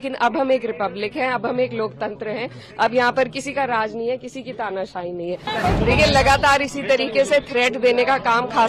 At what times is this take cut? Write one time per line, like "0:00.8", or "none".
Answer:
0:05.5

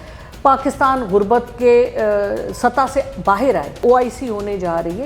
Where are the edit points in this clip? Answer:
0:03.8

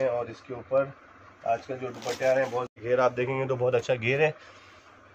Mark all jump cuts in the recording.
0:02.8

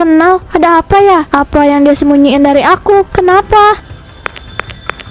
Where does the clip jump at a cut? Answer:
0:04.1

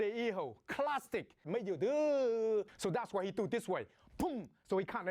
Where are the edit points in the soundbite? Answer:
none

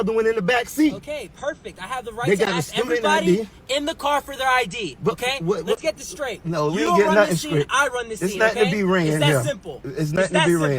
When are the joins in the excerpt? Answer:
0:06.4

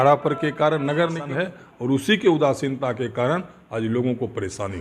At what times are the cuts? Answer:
0:01.2

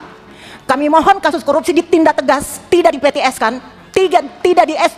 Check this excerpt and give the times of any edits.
none

